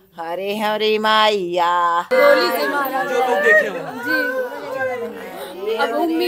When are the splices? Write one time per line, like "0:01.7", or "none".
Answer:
0:02.1